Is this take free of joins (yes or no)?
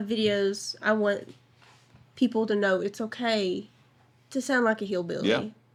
yes